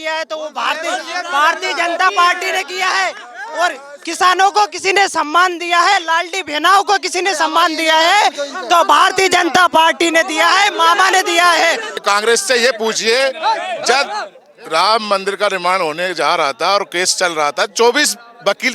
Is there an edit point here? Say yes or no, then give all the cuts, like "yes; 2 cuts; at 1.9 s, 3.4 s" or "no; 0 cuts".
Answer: yes; 1 cut; at 12.0 s